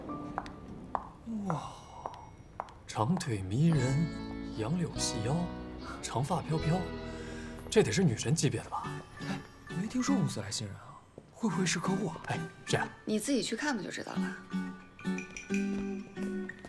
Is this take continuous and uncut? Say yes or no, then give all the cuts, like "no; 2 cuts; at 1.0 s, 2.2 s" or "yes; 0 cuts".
yes; 0 cuts